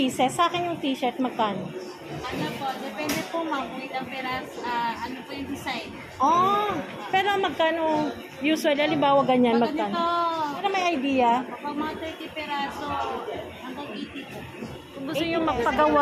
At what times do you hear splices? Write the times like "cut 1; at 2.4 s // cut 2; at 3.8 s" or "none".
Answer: cut 1; at 2.1 s // cut 2; at 10.6 s // cut 3; at 15.3 s